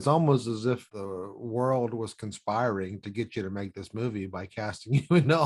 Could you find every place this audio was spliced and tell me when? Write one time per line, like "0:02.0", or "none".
0:00.9